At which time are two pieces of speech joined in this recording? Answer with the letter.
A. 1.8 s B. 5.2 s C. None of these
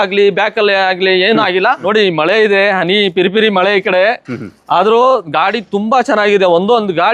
A